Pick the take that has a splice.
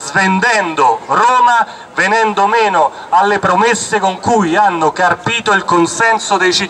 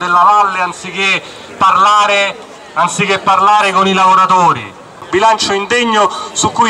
second; 1 cut; at 5.1 s

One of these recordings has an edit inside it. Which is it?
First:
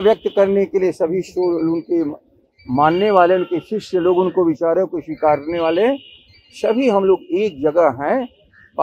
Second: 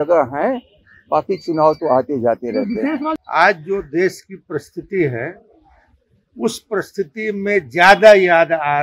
second; 1 cut; at 3.1 s

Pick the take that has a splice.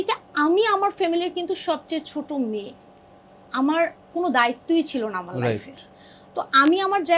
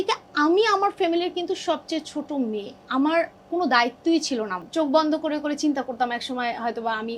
second; 2 cuts; at 2.8 s, 4.6 s

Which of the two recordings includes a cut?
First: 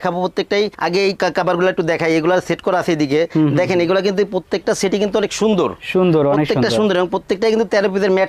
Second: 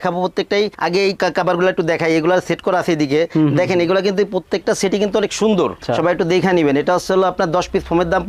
second; 1 cut; at 5.8 s

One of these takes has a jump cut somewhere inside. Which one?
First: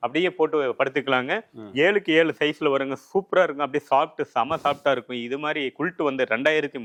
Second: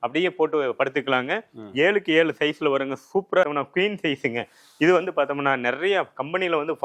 second; 1 cut; at 3.5 s

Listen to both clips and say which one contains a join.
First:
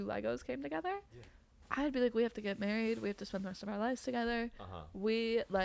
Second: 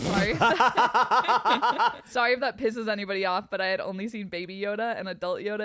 second; 1 cut; at 2.0 s

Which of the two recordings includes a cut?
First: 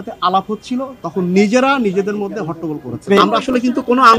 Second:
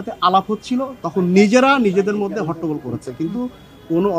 first; 1 cut; at 3.1 s

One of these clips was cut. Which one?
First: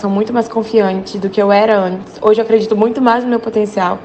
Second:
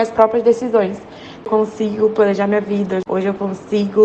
second; 1 cut; at 1.5 s

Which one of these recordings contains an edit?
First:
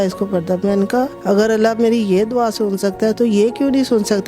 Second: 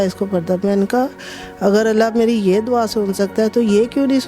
first; 1 cut; at 1.2 s

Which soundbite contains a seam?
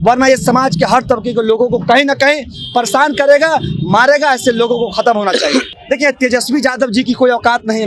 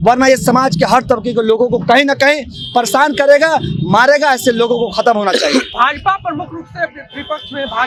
first; 1 cut; at 5.7 s

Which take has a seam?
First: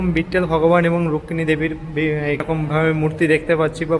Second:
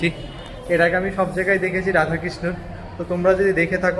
first; 1 cut; at 2.4 s

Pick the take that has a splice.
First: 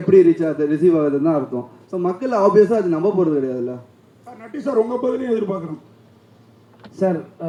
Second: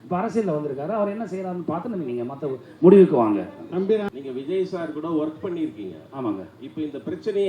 second; 1 cut; at 4.1 s

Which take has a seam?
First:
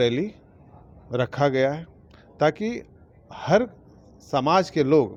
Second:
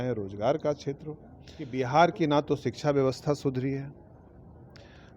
second; 1 cut; at 1.7 s

